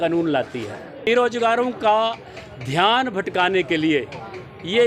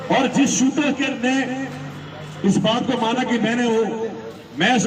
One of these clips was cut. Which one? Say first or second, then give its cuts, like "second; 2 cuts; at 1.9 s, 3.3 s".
first; 1 cut; at 1.1 s